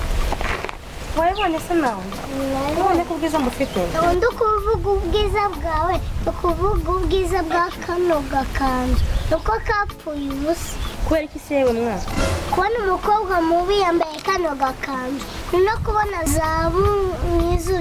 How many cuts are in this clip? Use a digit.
0